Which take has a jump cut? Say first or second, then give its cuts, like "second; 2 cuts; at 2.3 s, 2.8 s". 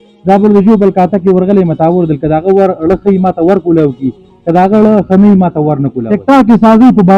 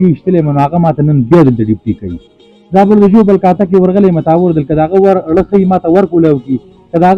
first; 1 cut; at 5.9 s